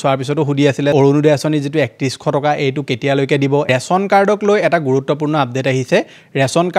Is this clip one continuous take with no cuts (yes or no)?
no